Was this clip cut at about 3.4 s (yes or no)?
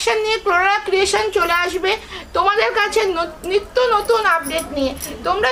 no